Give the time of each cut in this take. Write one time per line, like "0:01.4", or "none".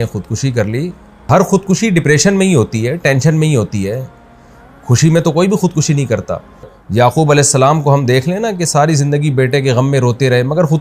0:01.3
0:06.8

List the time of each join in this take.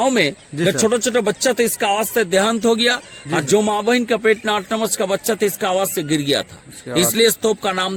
none

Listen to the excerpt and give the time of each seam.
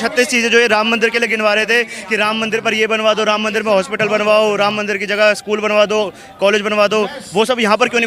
none

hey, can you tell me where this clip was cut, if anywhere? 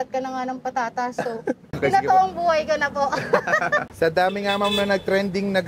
0:01.7
0:03.9

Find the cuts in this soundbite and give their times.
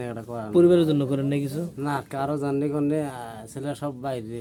none

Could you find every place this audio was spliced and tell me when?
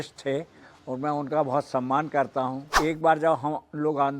0:02.8

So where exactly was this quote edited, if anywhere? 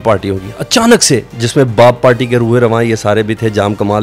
0:01.4

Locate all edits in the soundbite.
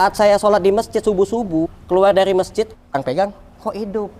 0:01.8
0:02.9

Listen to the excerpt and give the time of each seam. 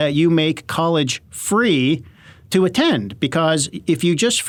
none

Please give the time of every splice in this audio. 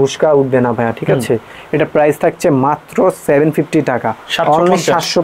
none

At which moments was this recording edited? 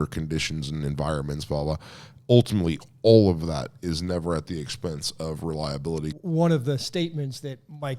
0:06.2

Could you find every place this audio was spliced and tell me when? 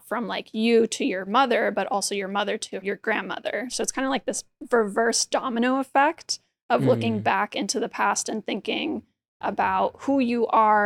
0:02.8
0:03.7

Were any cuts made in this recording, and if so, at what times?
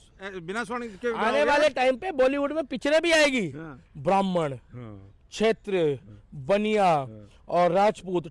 none

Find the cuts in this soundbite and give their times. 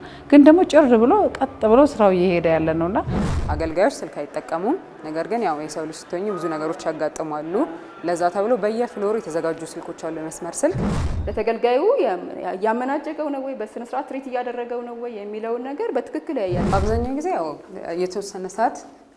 0:03.2
0:11.0
0:16.7

